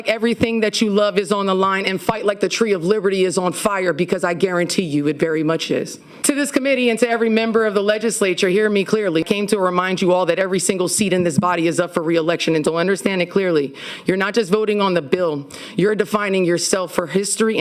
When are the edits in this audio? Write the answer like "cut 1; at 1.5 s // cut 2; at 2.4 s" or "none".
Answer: none